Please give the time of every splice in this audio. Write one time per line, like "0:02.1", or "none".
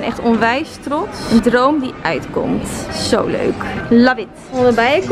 none